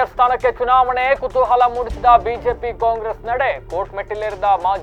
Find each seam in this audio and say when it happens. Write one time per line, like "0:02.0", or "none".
none